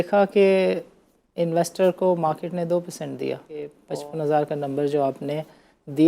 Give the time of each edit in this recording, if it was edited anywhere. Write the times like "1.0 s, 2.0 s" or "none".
3.8 s